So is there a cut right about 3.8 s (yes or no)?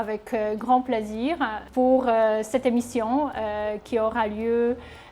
no